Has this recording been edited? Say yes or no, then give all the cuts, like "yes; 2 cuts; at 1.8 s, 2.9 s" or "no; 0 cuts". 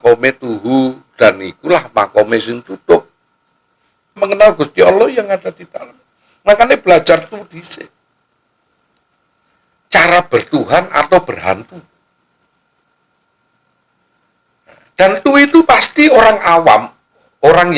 yes; 1 cut; at 4.2 s